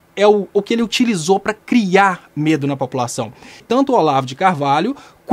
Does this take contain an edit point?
yes; 1 cut; at 3.5 s

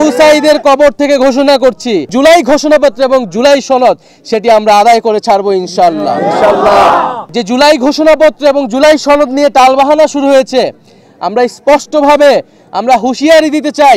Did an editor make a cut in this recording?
yes; 2 cuts; at 2.1 s, 7.2 s

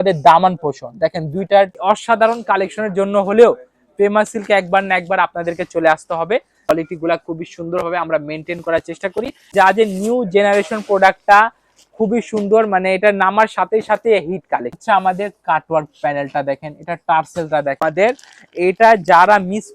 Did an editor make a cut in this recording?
yes; 5 cuts; at 1.8 s, 6.7 s, 9.5 s, 14.8 s, 17.8 s

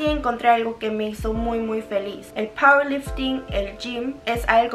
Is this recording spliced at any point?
no; 0 cuts

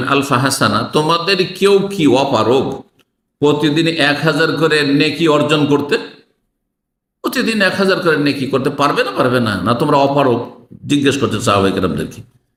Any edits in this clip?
no; 0 cuts

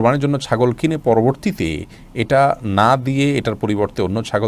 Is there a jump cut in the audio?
no; 0 cuts

